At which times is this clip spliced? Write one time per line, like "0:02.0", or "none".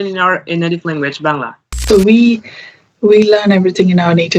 0:01.8